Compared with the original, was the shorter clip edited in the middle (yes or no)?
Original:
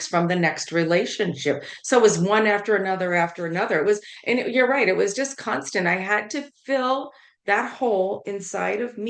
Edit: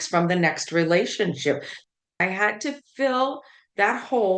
yes